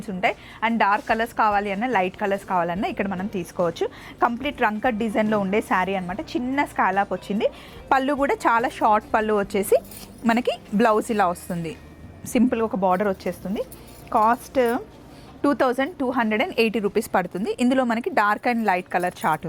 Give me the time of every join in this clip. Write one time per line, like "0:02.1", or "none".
none